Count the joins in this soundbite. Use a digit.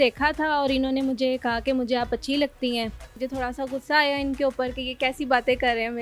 1